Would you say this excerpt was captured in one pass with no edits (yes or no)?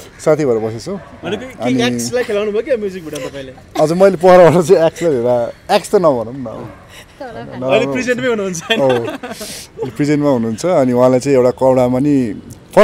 yes